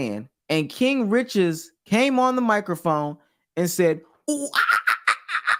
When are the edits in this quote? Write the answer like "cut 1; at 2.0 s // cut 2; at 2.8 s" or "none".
none